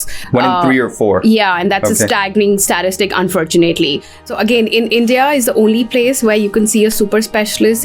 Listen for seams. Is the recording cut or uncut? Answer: cut